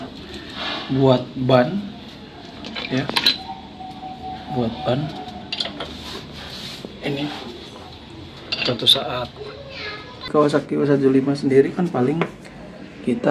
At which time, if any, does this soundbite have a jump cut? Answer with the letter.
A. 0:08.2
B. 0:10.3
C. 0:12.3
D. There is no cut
B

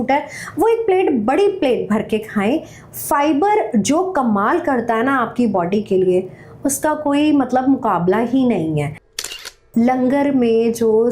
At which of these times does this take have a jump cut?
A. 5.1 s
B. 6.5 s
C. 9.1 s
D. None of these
C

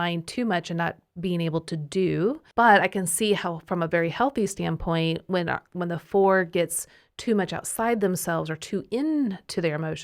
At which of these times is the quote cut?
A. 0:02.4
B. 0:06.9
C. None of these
A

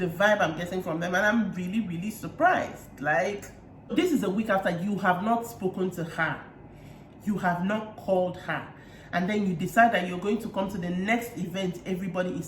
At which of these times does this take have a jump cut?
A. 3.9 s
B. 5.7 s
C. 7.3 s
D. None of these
A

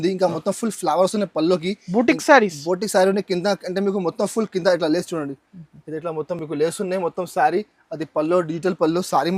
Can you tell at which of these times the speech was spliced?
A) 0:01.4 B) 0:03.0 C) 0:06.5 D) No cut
D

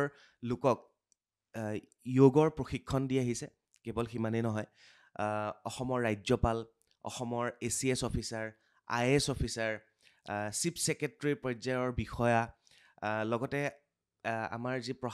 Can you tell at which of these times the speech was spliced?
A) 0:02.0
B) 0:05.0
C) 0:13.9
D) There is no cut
D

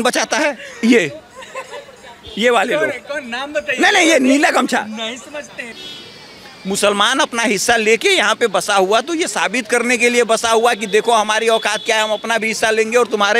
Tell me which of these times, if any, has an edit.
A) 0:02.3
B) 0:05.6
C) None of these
B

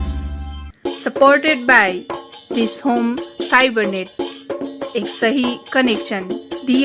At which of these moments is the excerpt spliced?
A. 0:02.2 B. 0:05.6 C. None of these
C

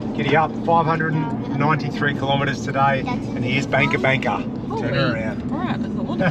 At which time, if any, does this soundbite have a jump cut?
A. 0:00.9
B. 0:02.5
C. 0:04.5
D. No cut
D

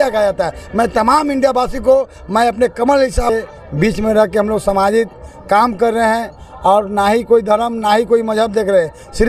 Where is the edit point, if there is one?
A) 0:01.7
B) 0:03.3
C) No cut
B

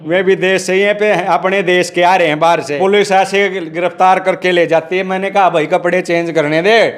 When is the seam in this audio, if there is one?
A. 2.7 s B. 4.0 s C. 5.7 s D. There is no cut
A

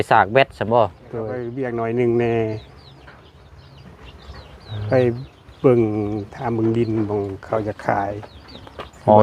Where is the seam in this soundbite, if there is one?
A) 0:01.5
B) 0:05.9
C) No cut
A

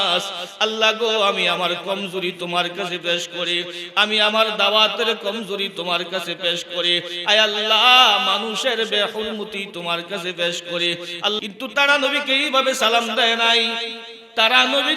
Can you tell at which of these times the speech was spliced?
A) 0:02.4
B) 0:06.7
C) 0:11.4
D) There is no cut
C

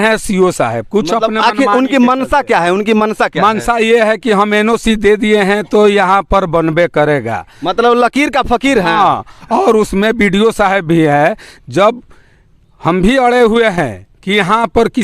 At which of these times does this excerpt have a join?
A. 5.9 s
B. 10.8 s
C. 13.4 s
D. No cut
D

